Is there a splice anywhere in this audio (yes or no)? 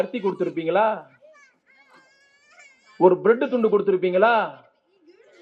no